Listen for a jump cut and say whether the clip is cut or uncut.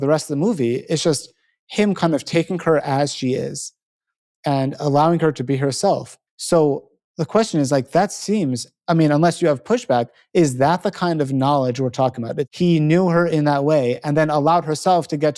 cut